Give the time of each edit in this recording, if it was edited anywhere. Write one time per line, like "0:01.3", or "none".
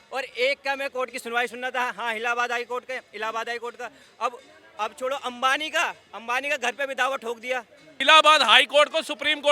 0:07.8